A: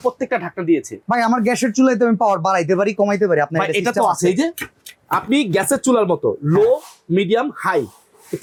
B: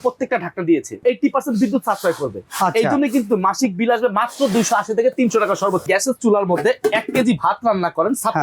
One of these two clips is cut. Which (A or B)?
B